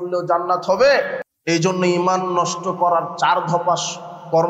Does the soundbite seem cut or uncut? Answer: cut